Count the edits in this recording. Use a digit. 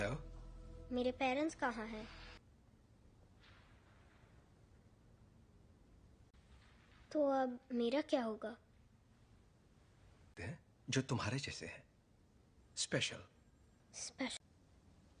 1